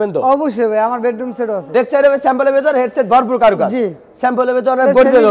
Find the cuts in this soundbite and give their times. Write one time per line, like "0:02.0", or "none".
0:01.6